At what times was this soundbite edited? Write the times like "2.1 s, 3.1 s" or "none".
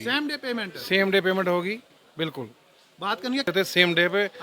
3.5 s